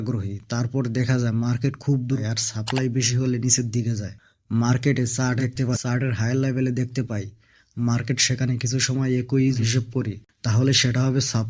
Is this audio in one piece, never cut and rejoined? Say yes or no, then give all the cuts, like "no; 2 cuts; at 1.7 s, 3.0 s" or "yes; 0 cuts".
no; 3 cuts; at 2.2 s, 5.4 s, 9.6 s